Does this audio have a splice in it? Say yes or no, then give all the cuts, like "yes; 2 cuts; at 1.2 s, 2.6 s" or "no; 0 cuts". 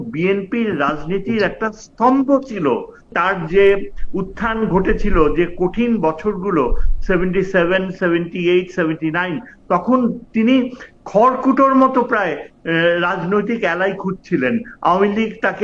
yes; 1 cut; at 3.1 s